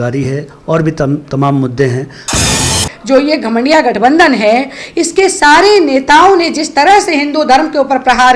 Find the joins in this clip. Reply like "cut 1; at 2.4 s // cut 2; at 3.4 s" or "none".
cut 1; at 2.6 s